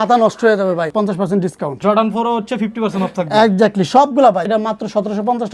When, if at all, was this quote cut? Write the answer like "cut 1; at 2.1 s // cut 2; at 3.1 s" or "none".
cut 1; at 1.3 s // cut 2; at 4.4 s